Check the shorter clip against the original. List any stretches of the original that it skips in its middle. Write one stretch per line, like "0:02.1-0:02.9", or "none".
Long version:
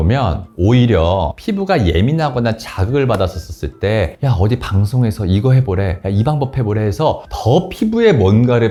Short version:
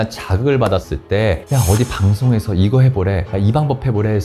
0:03.4-0:03.6